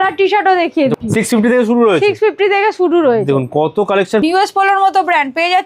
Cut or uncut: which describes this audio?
cut